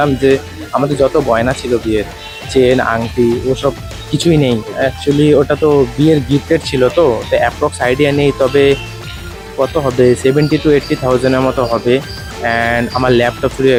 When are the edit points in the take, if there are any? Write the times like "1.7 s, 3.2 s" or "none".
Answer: none